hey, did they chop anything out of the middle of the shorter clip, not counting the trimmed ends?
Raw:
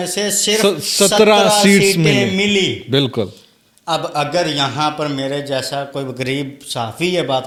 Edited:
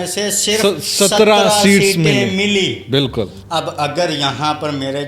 yes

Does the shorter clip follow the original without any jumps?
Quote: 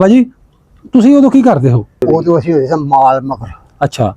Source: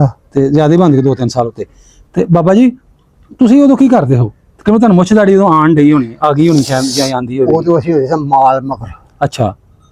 no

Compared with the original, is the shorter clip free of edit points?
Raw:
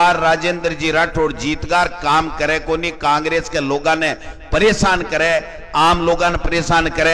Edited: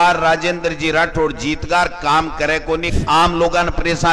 no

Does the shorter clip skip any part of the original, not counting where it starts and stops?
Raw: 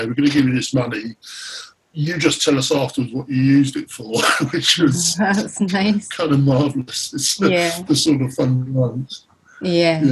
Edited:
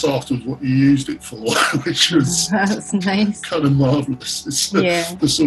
no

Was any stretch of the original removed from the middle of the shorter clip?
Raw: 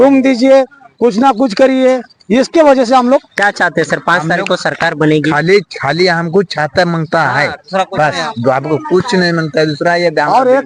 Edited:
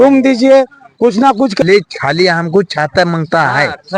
yes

